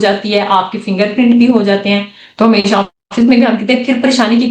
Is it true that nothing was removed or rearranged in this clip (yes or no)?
yes